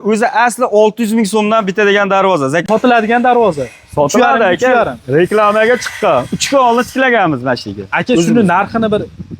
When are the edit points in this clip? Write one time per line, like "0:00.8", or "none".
0:02.6